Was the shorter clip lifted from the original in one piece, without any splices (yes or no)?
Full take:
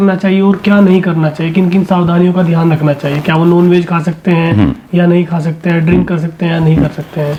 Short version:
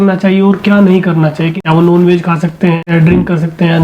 no